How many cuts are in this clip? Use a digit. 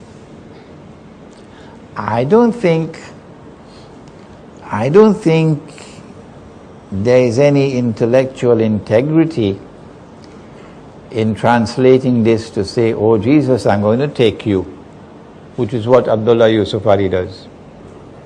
1